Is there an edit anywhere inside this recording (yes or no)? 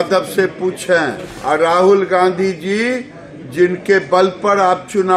yes